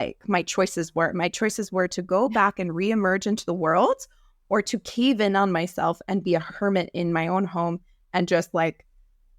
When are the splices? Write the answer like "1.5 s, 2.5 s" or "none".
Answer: none